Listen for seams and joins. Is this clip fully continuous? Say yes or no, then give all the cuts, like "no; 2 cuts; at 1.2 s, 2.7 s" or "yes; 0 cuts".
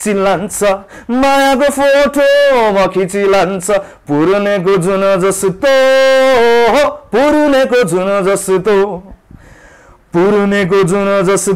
yes; 0 cuts